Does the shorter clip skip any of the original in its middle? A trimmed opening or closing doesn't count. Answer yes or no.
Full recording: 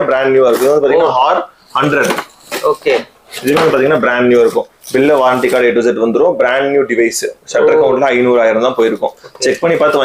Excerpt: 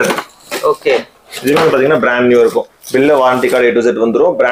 no